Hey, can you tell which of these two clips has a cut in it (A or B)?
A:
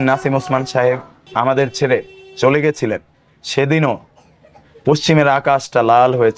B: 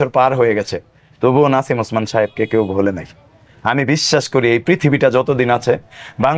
A